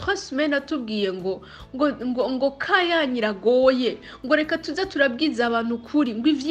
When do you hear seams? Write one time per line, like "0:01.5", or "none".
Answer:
none